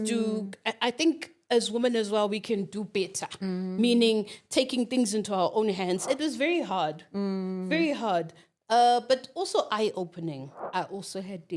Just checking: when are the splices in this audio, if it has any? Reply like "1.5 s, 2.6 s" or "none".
6.0 s, 10.5 s